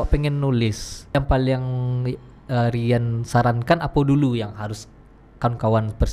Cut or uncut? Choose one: cut